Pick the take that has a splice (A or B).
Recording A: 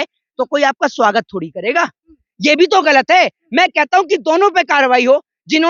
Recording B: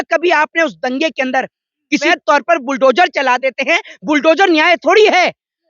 B